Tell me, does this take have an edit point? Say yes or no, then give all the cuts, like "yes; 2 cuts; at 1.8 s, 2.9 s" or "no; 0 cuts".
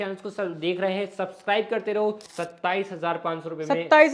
yes; 1 cut; at 2.3 s